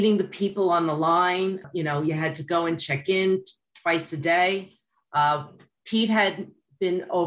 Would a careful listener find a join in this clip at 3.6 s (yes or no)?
no